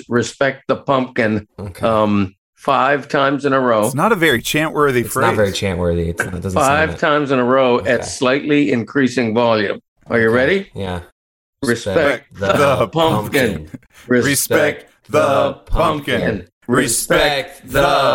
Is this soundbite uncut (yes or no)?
yes